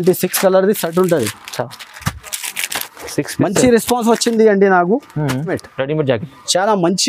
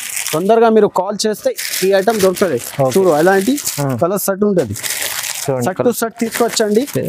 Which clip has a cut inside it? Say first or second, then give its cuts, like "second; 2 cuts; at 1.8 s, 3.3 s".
first; 1 cut; at 5.6 s